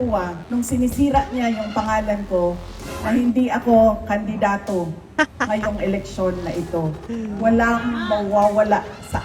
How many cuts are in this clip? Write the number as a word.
zero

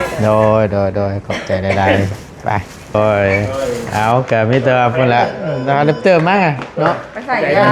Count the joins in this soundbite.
one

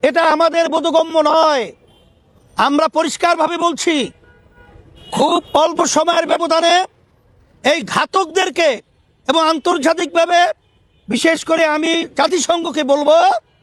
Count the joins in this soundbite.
zero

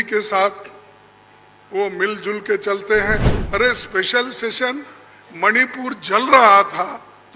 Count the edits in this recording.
one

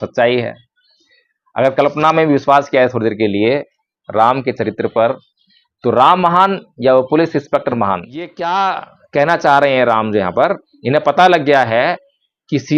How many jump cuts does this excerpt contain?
one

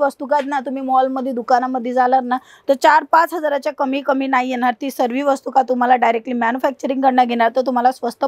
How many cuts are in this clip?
zero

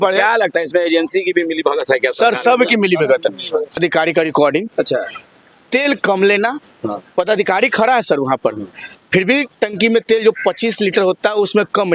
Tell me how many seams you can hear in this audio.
one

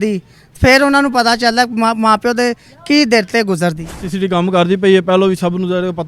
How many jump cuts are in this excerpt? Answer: one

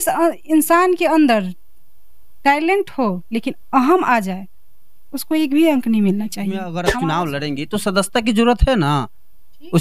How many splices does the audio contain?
one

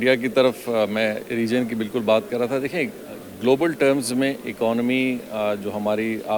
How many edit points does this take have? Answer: zero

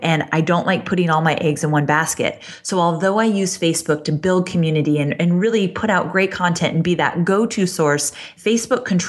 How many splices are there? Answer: one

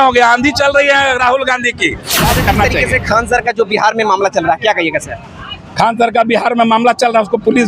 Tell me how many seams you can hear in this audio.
one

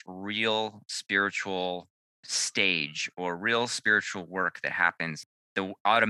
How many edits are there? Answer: one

